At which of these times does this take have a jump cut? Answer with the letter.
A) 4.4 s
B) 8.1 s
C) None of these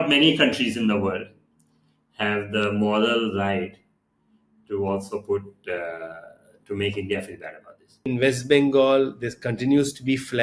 B